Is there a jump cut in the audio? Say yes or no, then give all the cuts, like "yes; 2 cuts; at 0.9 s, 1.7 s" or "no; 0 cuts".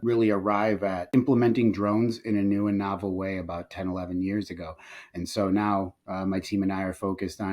yes; 1 cut; at 1.0 s